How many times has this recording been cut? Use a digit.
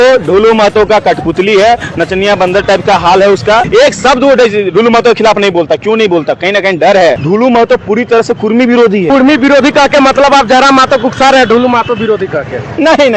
3